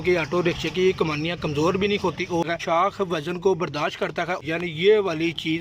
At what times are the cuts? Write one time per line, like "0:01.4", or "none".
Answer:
0:02.4
0:04.4